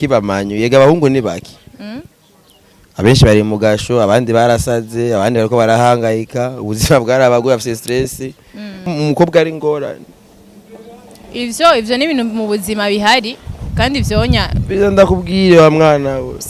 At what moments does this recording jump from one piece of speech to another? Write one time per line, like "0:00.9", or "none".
0:08.8

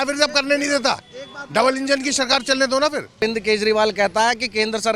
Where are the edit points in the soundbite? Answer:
0:03.2

